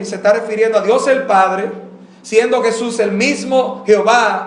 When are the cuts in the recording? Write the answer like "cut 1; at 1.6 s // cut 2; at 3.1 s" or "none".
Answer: cut 1; at 1.2 s